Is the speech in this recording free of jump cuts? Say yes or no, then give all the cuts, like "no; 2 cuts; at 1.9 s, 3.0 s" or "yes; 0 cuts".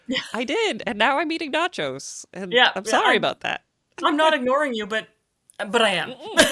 yes; 0 cuts